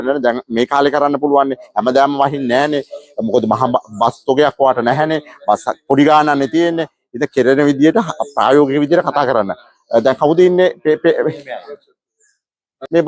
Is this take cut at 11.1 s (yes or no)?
no